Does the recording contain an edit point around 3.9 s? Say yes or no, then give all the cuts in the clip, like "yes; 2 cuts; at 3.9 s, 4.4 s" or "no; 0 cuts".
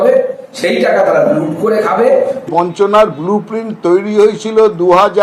no; 1 cut; at 2.5 s